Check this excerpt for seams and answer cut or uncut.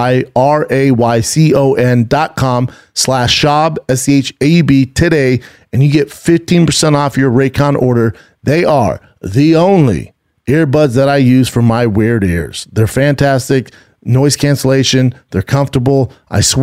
uncut